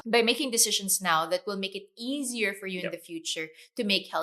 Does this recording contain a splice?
no; 0 cuts

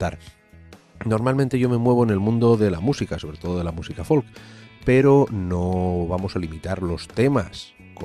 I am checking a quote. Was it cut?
no; 0 cuts

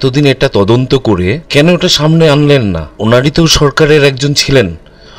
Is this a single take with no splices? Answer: no; 2 cuts; at 1.4 s, 2.9 s

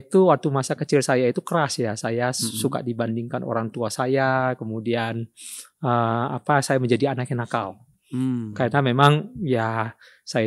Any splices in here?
no; 0 cuts

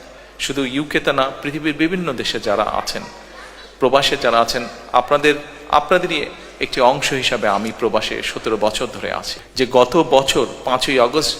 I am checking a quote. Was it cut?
yes; 1 cut; at 9.4 s

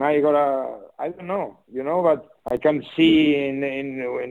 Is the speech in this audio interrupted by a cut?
yes; 1 cut; at 2.3 s

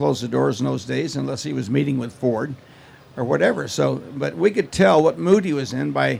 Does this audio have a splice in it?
no; 0 cuts

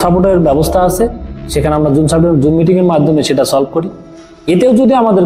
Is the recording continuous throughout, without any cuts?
yes; 0 cuts

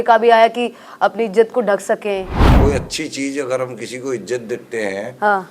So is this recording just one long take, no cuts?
no; 1 cut; at 2.4 s

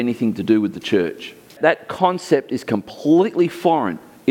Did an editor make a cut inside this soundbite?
yes; 1 cut; at 1.5 s

